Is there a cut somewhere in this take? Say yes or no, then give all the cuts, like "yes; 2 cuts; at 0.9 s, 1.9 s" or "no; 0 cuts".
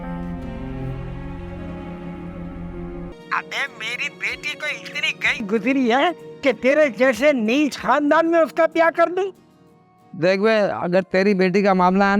yes; 1 cut; at 3.1 s